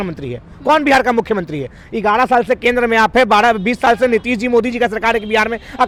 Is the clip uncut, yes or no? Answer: yes